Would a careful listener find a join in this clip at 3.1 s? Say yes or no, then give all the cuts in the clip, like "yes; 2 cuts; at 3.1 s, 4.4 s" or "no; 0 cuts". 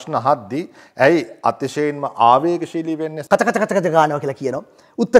yes; 1 cut; at 3.1 s